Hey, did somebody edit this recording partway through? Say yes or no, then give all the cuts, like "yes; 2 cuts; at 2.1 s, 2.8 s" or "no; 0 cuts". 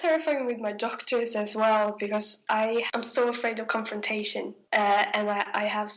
yes; 2 cuts; at 2.9 s, 4.6 s